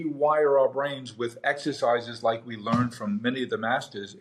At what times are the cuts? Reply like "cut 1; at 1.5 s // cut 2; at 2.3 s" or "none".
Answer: none